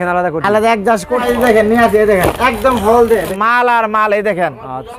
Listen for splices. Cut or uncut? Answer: cut